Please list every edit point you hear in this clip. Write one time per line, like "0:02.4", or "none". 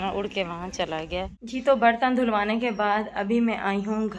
0:01.4